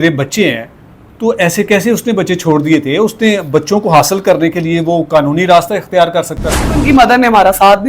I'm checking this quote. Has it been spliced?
yes; 1 cut; at 6.8 s

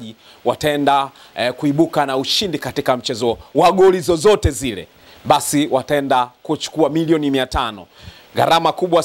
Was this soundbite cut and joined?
no; 0 cuts

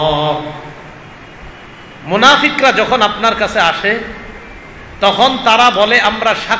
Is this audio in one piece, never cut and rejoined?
yes; 0 cuts

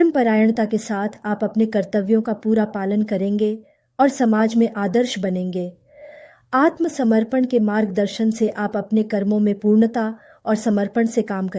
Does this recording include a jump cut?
no; 0 cuts

